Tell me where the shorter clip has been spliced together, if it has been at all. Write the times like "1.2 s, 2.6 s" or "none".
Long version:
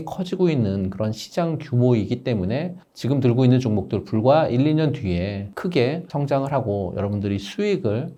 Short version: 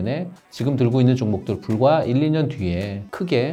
none